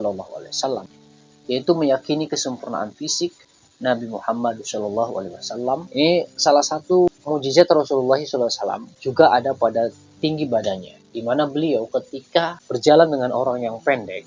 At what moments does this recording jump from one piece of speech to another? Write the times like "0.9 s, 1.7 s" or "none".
5.9 s